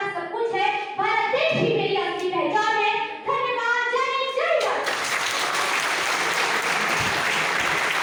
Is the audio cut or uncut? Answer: uncut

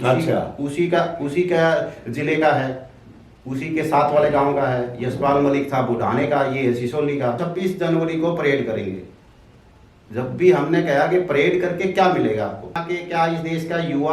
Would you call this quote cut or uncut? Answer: cut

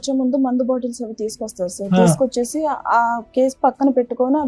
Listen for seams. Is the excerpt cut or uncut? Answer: uncut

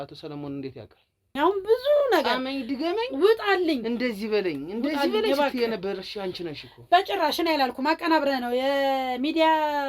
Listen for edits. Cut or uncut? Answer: cut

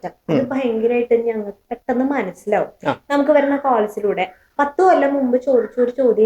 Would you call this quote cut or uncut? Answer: uncut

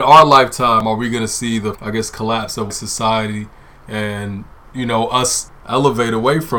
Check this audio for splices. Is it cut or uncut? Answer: cut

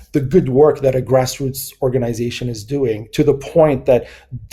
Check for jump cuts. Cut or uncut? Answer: uncut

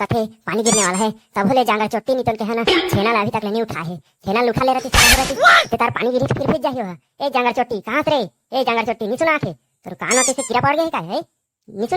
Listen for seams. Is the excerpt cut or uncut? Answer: uncut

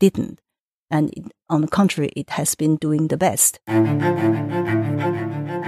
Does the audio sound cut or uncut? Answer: cut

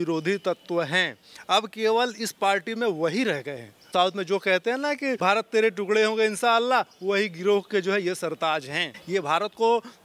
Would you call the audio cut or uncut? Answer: cut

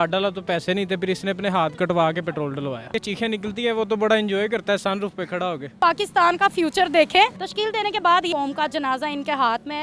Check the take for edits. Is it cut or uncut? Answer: cut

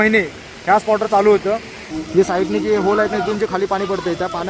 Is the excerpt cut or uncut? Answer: cut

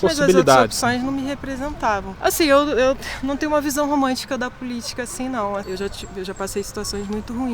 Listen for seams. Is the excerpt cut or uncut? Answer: cut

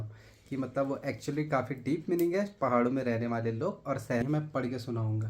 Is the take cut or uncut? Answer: cut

